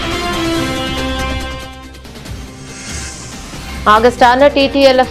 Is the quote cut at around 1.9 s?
no; 1 cut; at 3.3 s

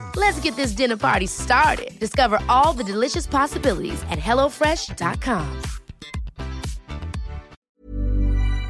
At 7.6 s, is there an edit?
yes; 1 cut; at 7.6 s

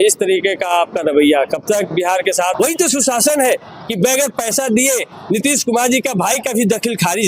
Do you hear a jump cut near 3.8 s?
no; 1 cut; at 2.5 s

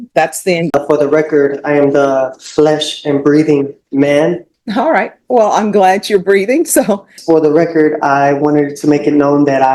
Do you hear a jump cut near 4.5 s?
yes; 3 cuts; at 0.7 s, 4.5 s, 7.1 s

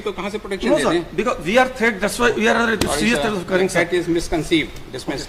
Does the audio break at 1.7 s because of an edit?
no; 0 cuts

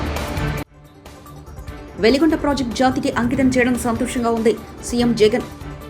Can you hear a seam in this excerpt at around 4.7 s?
no; 1 cut; at 1.9 s

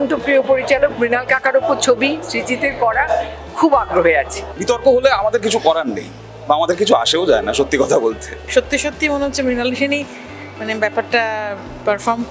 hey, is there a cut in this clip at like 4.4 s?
yes; 2 cuts; at 4.4 s, 8.4 s

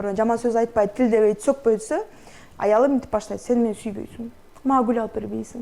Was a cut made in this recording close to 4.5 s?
no; 0 cuts

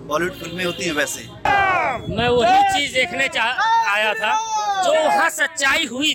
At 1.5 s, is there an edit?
yes; 1 cut; at 1.5 s

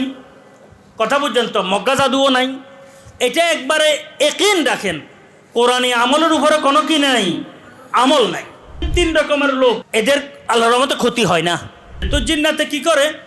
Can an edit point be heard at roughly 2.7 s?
no; 3 cuts; at 8.9 s, 9.8 s, 12.1 s

